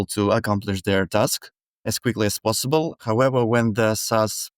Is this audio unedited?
no; 2 cuts; at 1.9 s, 3.0 s

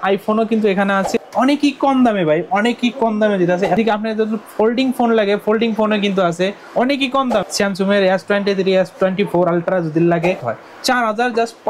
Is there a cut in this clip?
yes; 4 cuts; at 1.1 s, 3.8 s, 7.5 s, 10.5 s

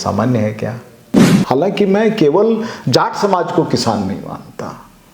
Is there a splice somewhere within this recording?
yes; 1 cut; at 1.3 s

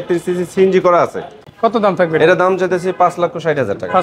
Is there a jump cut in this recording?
yes; 1 cut; at 1.4 s

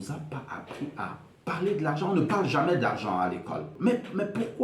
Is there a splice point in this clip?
yes; 1 cut; at 3.7 s

